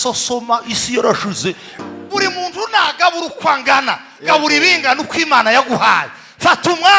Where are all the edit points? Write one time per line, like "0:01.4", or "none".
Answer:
0:01.9